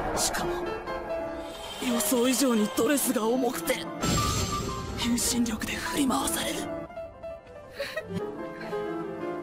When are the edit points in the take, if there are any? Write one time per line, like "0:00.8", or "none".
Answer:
0:06.3